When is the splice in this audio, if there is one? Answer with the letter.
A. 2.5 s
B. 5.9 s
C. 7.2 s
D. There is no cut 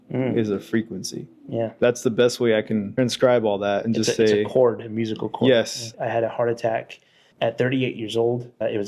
B